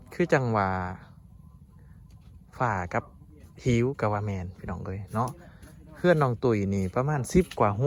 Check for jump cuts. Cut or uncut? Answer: uncut